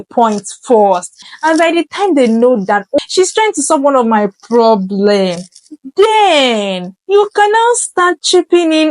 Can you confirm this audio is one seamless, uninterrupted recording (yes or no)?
no